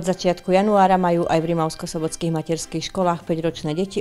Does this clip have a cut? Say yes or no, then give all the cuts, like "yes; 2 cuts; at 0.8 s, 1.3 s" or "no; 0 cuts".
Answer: no; 0 cuts